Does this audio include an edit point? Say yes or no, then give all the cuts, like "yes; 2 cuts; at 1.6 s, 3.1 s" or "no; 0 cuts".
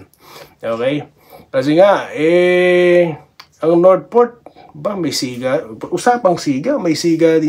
no; 0 cuts